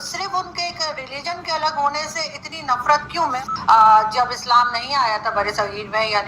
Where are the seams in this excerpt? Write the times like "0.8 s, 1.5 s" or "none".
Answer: 3.4 s